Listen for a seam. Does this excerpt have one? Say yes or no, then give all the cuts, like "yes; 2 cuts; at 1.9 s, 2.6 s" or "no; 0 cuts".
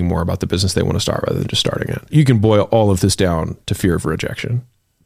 yes; 1 cut; at 2.1 s